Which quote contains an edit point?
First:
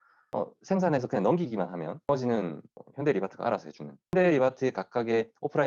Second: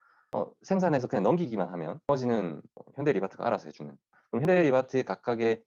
first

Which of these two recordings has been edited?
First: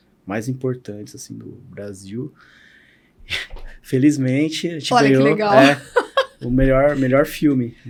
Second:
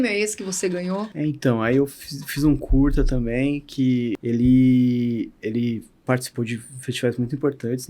second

